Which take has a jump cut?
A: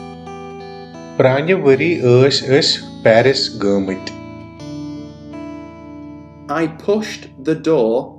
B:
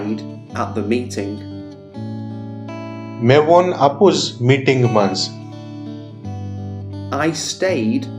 B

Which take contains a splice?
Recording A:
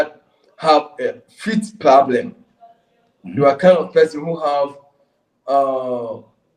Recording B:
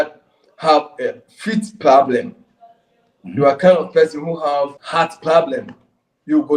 B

